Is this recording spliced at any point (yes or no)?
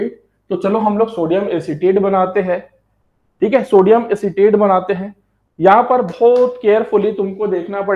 no